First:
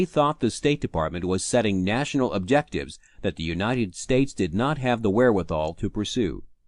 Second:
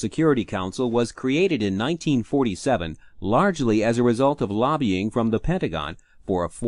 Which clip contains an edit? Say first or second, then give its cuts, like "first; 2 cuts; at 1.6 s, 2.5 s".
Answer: first; 1 cut; at 1.5 s